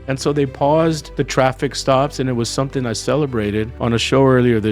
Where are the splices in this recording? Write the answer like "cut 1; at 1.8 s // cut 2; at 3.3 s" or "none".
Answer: cut 1; at 1.1 s // cut 2; at 3.7 s